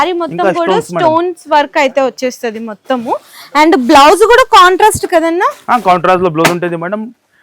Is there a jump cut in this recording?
no; 0 cuts

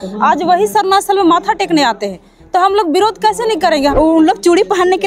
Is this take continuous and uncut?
no; 1 cut; at 3.9 s

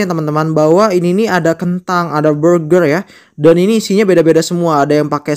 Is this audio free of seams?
yes; 0 cuts

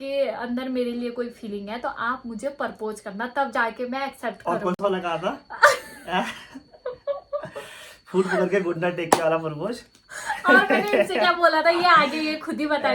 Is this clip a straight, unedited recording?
yes; 0 cuts

